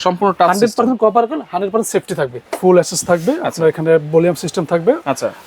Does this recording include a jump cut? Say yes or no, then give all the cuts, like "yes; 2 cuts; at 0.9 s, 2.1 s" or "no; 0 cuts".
yes; 1 cut; at 2.5 s